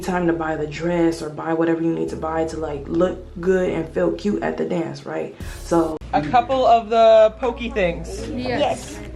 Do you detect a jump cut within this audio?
yes; 1 cut; at 6.0 s

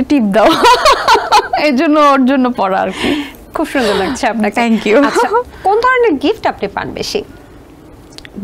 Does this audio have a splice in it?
no; 0 cuts

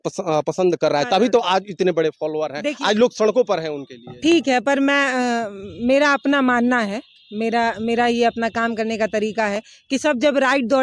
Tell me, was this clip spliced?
no; 0 cuts

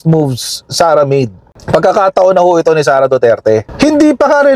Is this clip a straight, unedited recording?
no; 2 cuts; at 1.5 s, 3.7 s

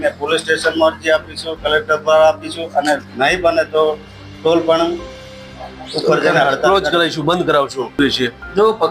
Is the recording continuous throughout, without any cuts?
no; 1 cut; at 8.0 s

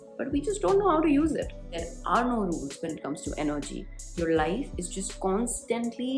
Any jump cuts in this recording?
yes; 1 cut; at 1.8 s

